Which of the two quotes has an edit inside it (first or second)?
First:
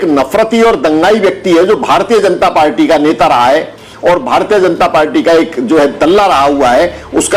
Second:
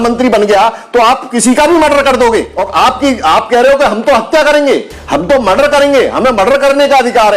second